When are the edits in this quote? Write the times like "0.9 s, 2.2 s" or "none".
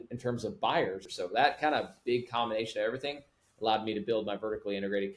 1.1 s